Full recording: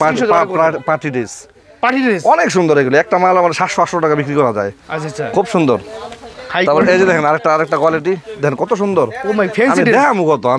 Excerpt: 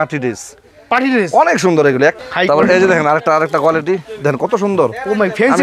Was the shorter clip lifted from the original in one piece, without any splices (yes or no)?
no